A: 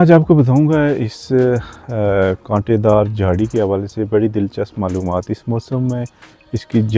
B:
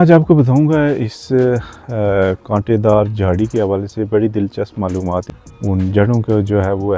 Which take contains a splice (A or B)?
B